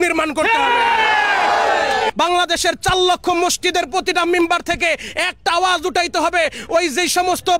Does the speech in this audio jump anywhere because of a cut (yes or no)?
yes